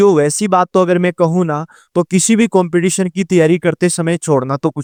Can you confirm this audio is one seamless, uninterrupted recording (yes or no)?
yes